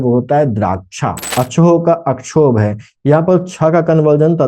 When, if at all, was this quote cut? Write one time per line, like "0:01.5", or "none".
0:01.1